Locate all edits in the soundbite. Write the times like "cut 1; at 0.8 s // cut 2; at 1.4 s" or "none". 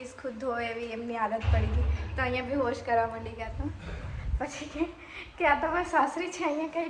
none

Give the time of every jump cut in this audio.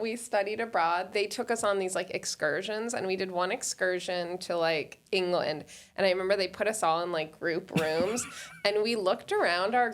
cut 1; at 1.1 s // cut 2; at 5.0 s

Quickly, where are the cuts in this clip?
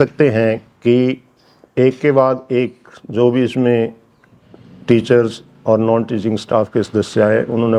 none

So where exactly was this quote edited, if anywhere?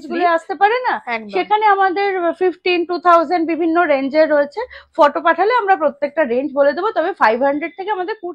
none

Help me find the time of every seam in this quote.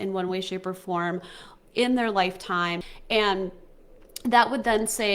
cut 1; at 2.9 s

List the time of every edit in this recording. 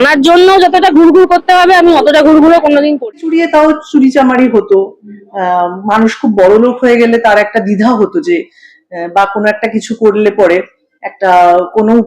cut 1; at 3.1 s

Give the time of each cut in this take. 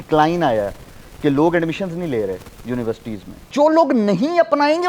cut 1; at 3.5 s

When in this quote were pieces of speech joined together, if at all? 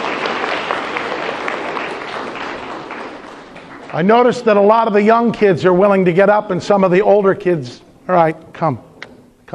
none

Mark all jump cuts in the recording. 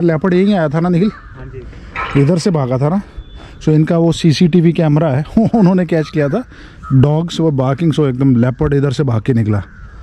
none

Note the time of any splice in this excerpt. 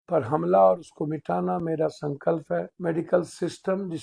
cut 1; at 2.7 s

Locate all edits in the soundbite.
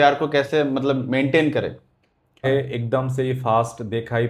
cut 1; at 2.4 s

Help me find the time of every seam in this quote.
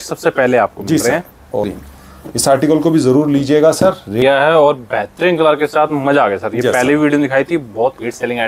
cut 1; at 1.7 s // cut 2; at 4.2 s

